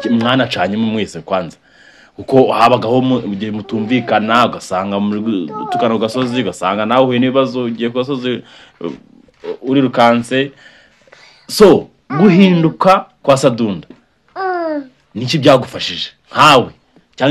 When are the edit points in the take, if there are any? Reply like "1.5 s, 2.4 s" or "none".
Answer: none